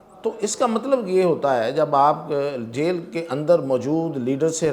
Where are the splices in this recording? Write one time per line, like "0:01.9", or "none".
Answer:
none